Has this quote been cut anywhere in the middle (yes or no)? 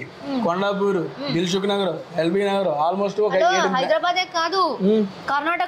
no